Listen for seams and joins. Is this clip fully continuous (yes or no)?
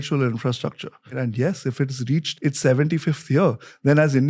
no